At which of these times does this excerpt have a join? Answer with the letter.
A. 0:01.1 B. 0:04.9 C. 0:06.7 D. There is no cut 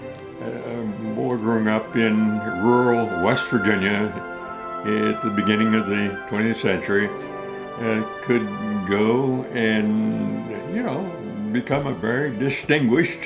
D